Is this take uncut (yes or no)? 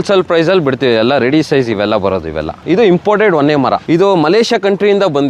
no